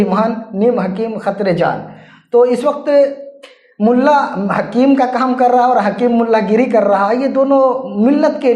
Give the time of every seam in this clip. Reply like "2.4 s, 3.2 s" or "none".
none